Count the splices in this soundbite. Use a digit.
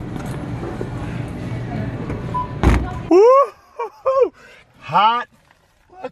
1